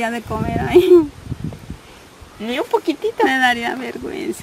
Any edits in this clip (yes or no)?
no